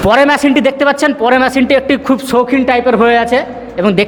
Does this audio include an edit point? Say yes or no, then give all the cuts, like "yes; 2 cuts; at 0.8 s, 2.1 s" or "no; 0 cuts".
no; 0 cuts